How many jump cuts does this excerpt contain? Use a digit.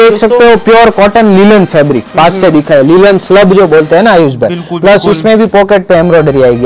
0